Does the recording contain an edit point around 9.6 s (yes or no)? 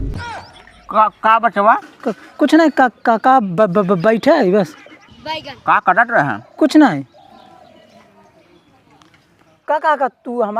yes